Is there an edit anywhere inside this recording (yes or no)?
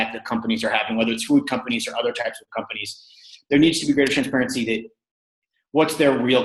no